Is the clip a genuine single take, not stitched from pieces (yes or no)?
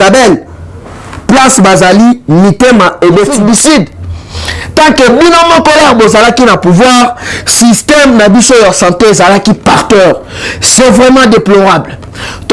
no